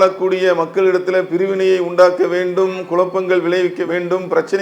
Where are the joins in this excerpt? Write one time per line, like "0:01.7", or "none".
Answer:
none